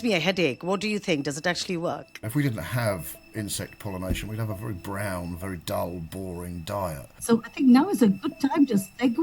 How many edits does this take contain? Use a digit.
2